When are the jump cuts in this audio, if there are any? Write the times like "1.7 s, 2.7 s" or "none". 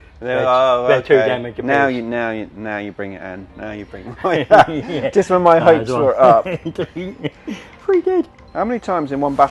8.4 s